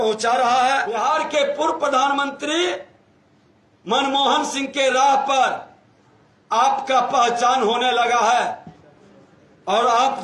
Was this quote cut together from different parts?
yes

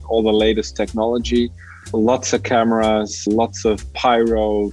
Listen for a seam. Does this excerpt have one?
no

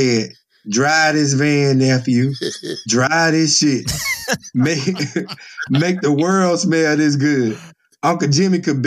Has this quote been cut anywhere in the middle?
no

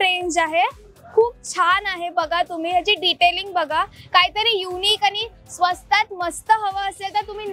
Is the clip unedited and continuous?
yes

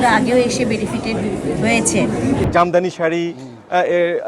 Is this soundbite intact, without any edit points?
no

